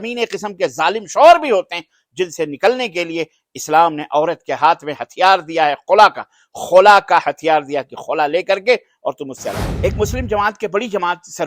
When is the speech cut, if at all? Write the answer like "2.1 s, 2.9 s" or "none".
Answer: 9.7 s

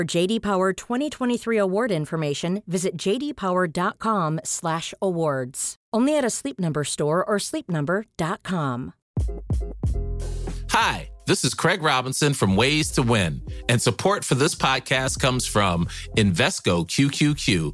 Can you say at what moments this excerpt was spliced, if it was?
9.0 s

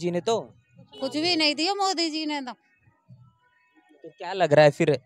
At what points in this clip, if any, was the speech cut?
none

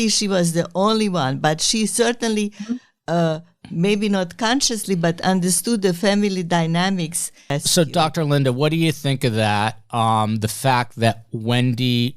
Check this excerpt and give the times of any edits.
7.6 s

